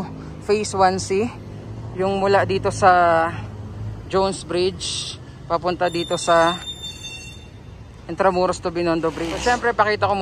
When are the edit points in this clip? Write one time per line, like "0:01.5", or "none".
0:09.3